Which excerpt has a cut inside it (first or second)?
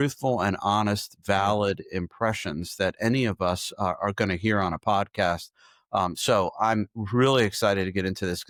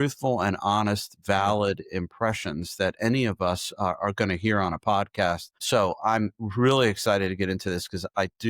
second